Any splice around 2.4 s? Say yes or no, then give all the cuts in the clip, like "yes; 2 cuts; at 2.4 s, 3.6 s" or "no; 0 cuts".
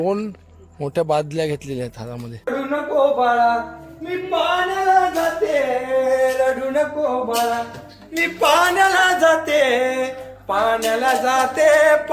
yes; 1 cut; at 2.4 s